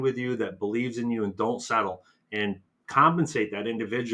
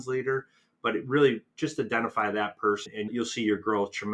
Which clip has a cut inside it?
second; 1 cut; at 3.0 s

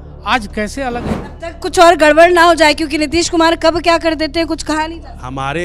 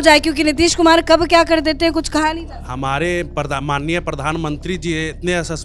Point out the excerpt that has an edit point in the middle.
first; 1 cut; at 1.2 s

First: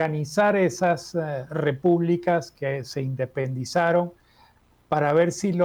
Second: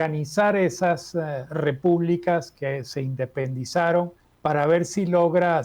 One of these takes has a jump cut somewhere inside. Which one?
second; 1 cut; at 4.2 s

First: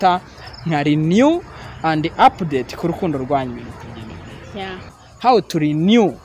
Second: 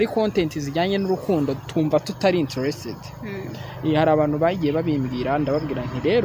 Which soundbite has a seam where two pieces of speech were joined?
first; 1 cut; at 5.0 s

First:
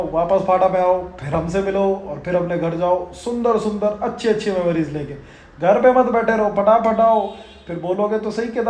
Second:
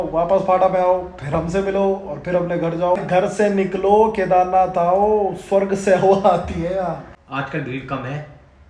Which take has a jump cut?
second; 2 cuts; at 3.0 s, 7.1 s

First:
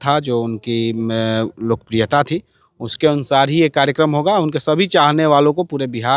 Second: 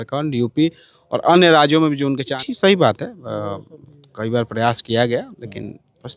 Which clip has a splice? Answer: second; 1 cut; at 2.3 s

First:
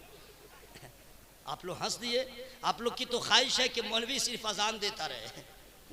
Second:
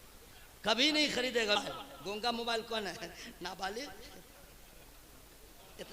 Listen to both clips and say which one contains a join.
second; 1 cut; at 1.6 s

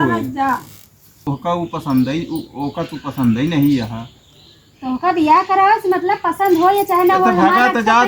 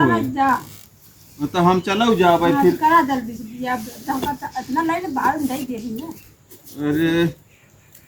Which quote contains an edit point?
first; 1 cut; at 1.1 s

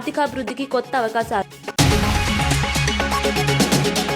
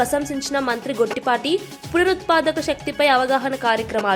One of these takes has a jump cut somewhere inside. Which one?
first; 1 cut; at 1.5 s

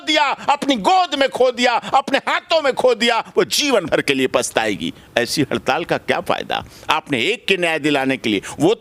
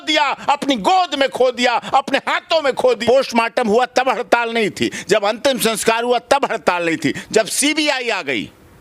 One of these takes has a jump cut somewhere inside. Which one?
second; 1 cut; at 3.0 s

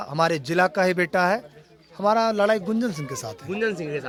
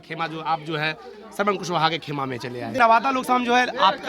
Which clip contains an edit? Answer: second; 1 cut; at 2.8 s

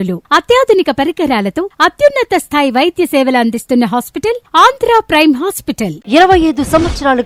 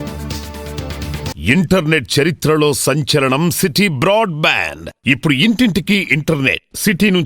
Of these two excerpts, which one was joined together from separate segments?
second; 1 cut; at 1.4 s

